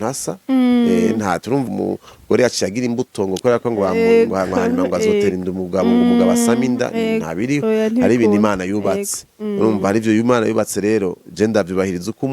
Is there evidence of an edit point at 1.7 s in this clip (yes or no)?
yes